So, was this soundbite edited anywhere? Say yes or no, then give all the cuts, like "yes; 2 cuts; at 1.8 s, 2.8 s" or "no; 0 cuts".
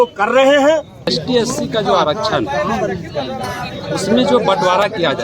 yes; 1 cut; at 1.2 s